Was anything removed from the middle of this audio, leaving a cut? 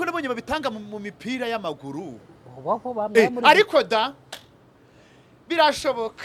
no; 0 cuts

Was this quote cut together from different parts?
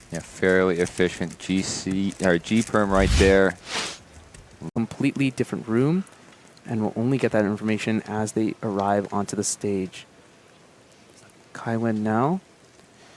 no; 0 cuts

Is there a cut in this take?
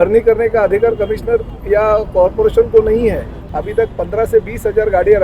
yes; 1 cut; at 3.4 s

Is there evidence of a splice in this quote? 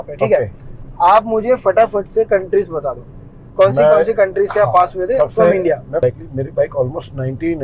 yes; 1 cut; at 6.0 s

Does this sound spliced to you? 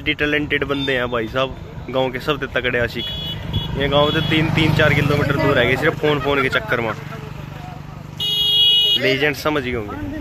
no; 0 cuts

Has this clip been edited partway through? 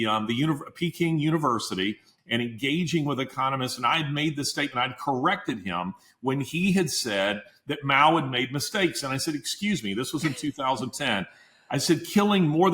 yes; 1 cut; at 2.1 s

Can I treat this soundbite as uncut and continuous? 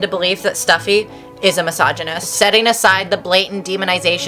no; 1 cut; at 2.3 s

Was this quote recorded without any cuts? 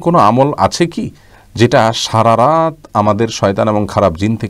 yes; 0 cuts

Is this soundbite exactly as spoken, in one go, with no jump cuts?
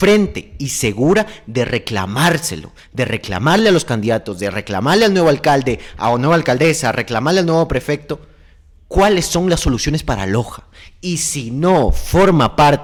yes; 0 cuts

